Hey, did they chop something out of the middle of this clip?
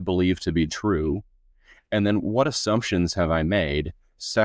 no; 0 cuts

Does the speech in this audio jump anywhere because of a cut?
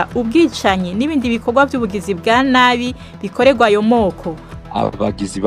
yes; 1 cut; at 4.6 s

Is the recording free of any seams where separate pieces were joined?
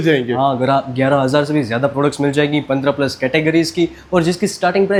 yes; 0 cuts

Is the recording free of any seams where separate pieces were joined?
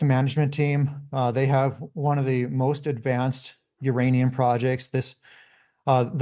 yes; 0 cuts

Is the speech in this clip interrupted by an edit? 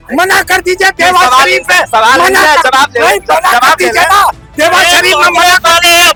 no; 0 cuts

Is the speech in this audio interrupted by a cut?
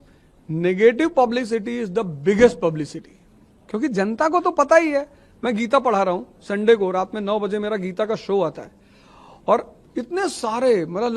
no; 0 cuts

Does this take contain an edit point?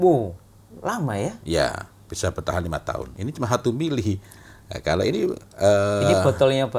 yes; 1 cut; at 3.1 s

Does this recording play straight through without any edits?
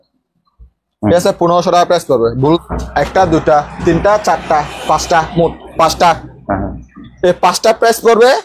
no; 1 cut; at 2.6 s

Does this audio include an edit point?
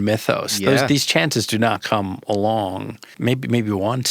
yes; 1 cut; at 3.1 s

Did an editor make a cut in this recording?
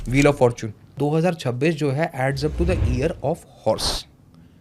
yes; 1 cut; at 1.0 s

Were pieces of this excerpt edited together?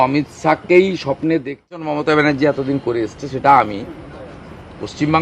yes; 1 cut; at 1.8 s

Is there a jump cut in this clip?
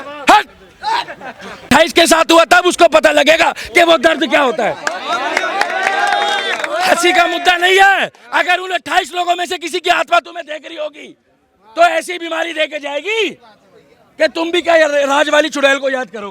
yes; 1 cut; at 1.7 s

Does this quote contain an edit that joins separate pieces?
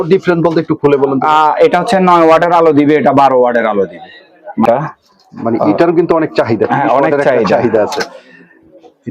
yes; 1 cut; at 4.7 s

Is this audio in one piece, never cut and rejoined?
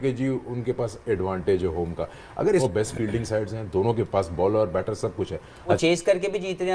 no; 2 cuts; at 2.6 s, 5.8 s

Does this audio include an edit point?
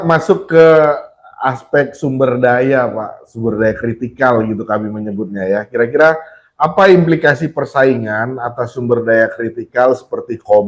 no; 0 cuts

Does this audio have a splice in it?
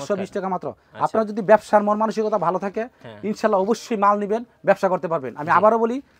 no; 0 cuts

